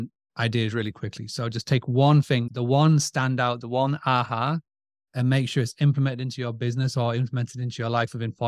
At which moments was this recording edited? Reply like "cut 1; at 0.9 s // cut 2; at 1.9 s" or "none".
none